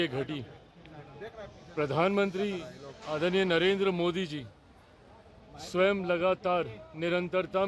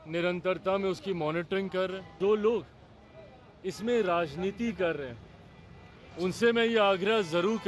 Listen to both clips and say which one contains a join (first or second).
second